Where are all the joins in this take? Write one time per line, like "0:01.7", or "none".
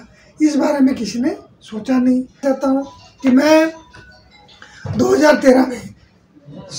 0:02.4